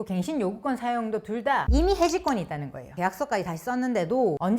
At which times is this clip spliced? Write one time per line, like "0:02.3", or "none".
0:02.9